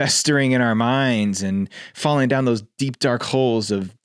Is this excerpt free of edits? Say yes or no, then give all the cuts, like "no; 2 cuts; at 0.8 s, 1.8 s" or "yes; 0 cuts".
yes; 0 cuts